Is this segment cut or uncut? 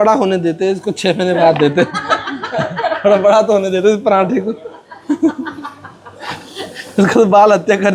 uncut